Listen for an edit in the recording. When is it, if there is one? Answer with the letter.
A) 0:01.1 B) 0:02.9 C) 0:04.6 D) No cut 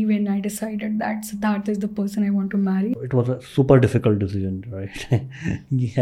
B